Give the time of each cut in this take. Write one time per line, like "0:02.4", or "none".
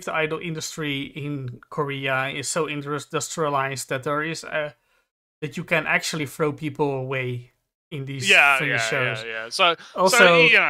none